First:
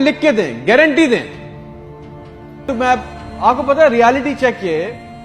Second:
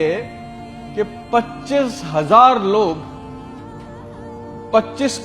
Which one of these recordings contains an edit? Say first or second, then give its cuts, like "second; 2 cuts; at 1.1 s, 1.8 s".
first; 1 cut; at 2.7 s